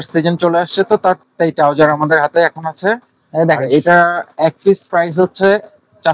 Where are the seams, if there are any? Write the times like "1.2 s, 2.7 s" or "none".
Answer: none